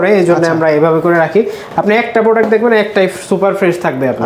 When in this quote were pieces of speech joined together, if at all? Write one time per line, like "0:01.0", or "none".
none